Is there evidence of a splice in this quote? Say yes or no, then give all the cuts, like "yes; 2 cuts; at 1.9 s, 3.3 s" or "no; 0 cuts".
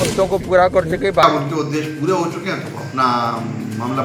yes; 1 cut; at 1.2 s